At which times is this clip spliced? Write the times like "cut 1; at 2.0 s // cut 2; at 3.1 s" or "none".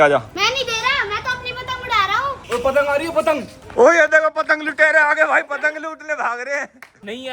cut 1; at 2.4 s